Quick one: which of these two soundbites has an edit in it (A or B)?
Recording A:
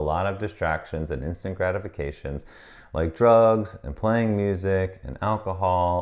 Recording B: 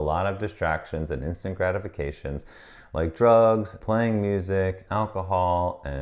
B